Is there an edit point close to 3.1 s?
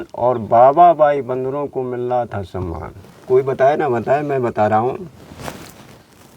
yes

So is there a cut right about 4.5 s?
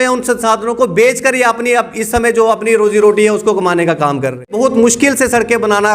yes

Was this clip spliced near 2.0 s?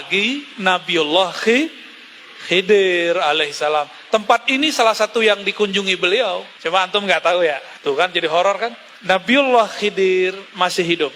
no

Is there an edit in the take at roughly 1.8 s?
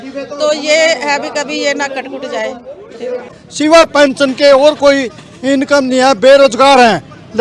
no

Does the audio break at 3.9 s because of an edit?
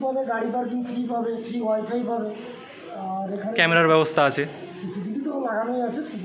no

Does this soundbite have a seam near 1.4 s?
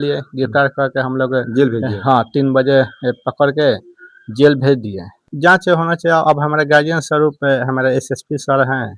no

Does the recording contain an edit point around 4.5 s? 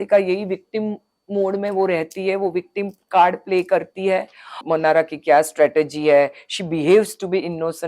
yes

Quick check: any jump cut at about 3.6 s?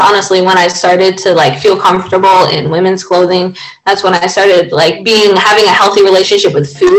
no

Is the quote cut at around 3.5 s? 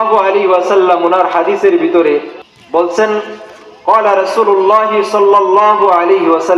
no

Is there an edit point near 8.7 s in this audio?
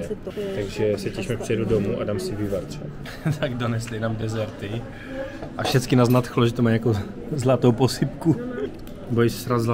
yes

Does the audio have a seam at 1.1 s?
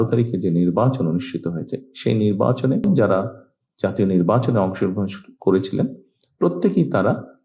no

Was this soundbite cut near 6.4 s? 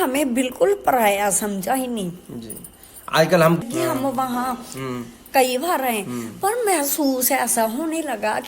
no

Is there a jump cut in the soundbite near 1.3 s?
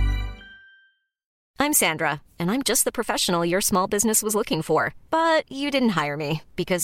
yes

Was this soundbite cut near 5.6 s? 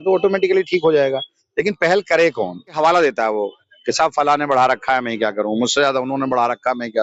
no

